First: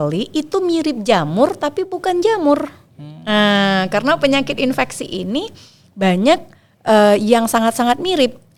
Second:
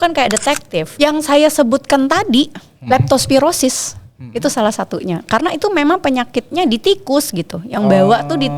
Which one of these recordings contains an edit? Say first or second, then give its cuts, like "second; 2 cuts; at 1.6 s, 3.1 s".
second; 1 cut; at 0.9 s